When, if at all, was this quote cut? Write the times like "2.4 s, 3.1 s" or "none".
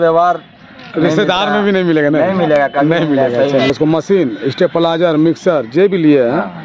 3.7 s

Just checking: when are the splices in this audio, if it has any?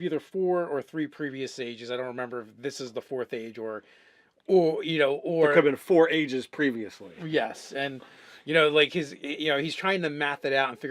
none

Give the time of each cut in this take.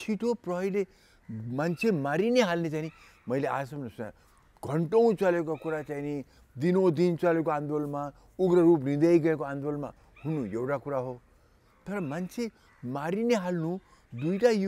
none

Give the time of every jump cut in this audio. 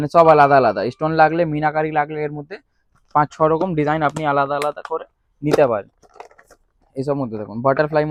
none

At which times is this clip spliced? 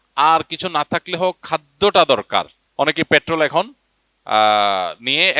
2.6 s

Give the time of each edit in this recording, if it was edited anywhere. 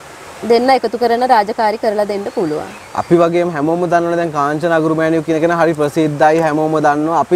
2.7 s

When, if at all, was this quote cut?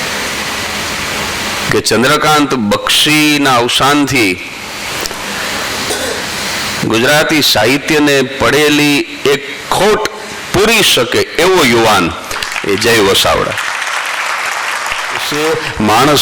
15.3 s

